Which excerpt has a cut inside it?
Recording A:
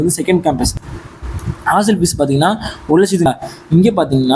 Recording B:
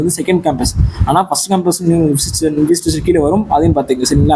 A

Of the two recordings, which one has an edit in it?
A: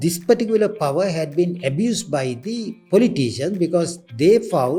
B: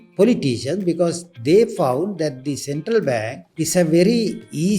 B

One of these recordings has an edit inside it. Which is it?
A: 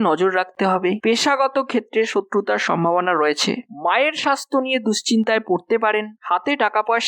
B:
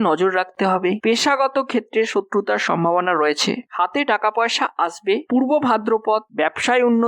B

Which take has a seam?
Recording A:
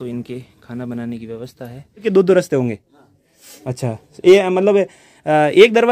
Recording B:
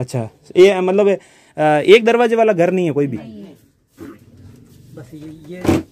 A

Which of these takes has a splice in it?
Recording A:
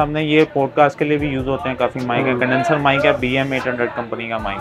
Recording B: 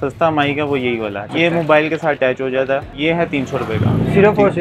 B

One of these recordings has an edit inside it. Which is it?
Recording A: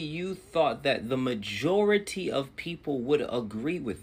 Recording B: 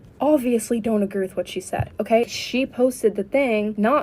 B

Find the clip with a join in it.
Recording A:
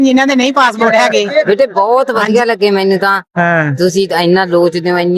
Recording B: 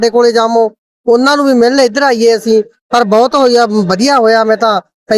A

